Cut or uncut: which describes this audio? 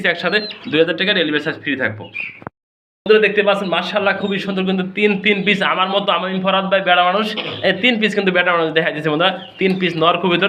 uncut